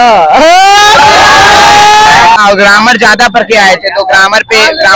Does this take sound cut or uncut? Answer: cut